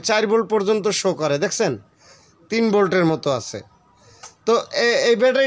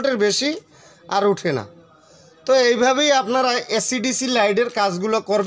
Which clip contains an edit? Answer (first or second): first